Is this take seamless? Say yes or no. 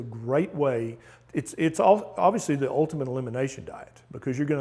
yes